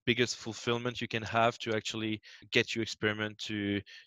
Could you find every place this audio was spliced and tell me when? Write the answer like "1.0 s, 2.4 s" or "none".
2.4 s